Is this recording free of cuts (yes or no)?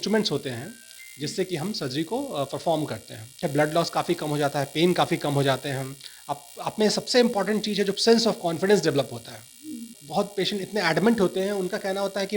no